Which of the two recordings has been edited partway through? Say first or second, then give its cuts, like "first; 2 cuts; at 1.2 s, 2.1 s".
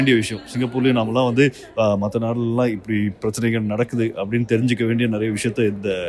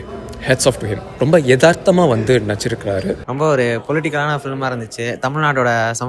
second; 1 cut; at 3.2 s